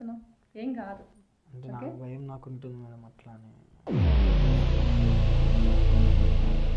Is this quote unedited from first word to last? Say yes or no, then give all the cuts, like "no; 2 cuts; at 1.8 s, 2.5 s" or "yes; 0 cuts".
yes; 0 cuts